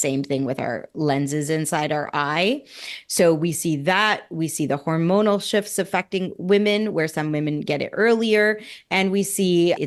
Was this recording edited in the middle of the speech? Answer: no; 0 cuts

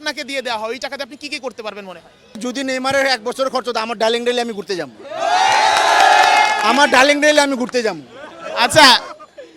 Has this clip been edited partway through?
yes; 1 cut; at 2.4 s

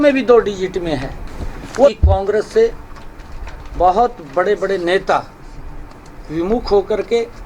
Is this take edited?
yes; 1 cut; at 1.9 s

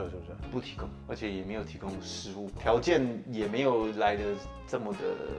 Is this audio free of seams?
yes; 0 cuts

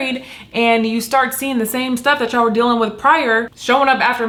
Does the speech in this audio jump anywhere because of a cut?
no; 0 cuts

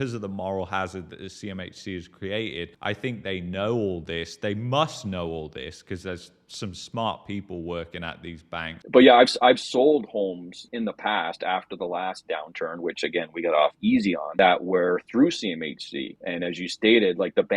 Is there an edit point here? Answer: yes; 1 cut; at 8.8 s

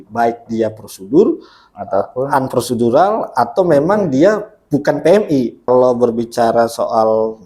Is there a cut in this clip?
yes; 1 cut; at 5.7 s

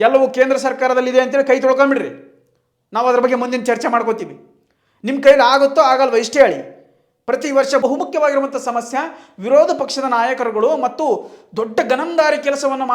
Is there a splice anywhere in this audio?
yes; 1 cut; at 7.8 s

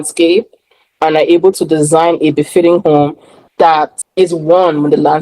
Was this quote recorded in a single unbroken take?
no; 1 cut; at 4.0 s

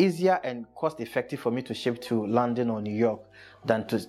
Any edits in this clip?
no; 0 cuts

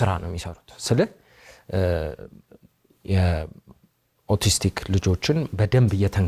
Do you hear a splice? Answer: no; 0 cuts

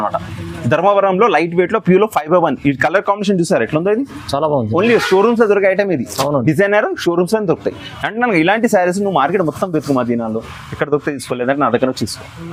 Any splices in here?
no; 0 cuts

